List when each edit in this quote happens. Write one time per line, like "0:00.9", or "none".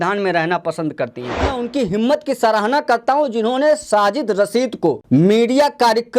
0:01.5
0:05.0